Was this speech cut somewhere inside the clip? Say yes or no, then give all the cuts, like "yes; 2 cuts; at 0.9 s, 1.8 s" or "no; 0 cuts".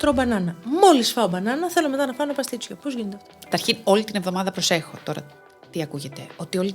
yes; 1 cut; at 3.5 s